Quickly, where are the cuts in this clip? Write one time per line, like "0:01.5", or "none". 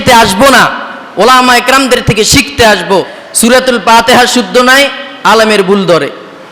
0:03.2

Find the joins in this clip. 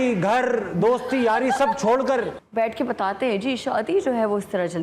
0:02.4

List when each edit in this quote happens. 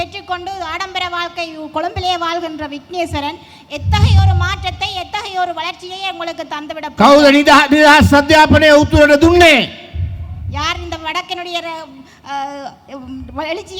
none

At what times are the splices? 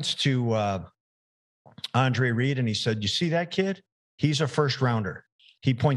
none

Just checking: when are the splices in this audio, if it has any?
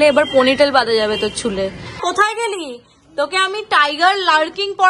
0:01.9

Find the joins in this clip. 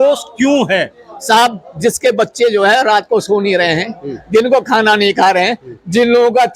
none

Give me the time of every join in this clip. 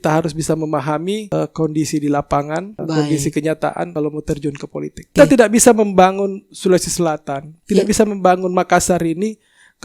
0:01.2
0:02.7
0:03.9
0:05.2

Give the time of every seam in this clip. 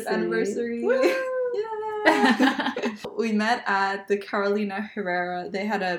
0:03.0

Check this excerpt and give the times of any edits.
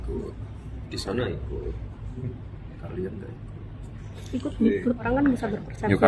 0:05.0

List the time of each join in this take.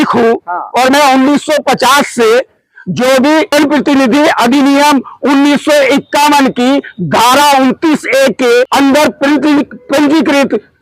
0:03.5
0:08.7

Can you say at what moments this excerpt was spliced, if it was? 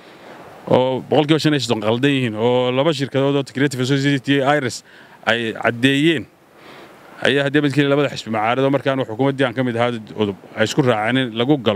none

